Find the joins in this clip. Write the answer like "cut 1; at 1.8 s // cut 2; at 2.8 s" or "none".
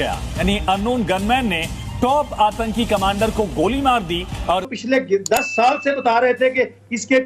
cut 1; at 4.7 s